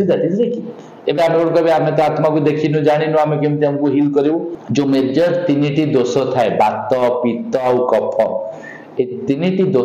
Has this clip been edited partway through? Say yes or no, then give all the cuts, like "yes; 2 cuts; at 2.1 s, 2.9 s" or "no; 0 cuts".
yes; 1 cut; at 4.6 s